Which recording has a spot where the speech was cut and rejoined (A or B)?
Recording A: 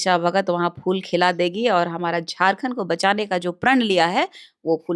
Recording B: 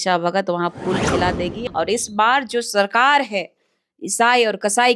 B